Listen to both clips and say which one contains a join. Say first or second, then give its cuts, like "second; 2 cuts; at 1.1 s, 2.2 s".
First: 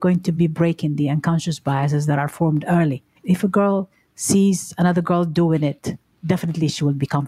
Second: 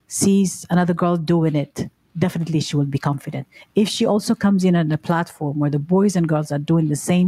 first; 1 cut; at 3.2 s